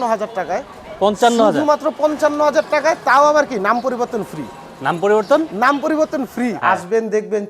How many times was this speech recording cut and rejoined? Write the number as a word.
one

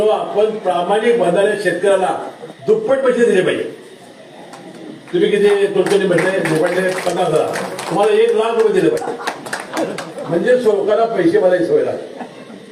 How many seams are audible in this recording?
zero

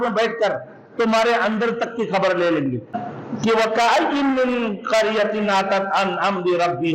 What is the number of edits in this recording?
one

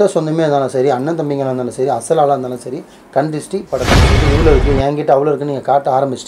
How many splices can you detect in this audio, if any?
one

